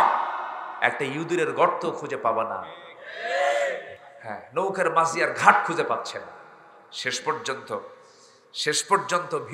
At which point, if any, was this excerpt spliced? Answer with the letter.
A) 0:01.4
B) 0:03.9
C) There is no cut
B